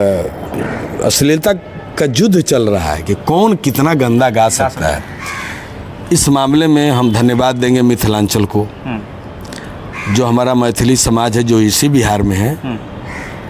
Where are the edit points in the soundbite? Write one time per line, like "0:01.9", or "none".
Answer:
none

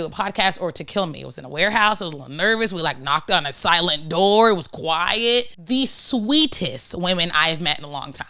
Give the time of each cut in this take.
0:05.6

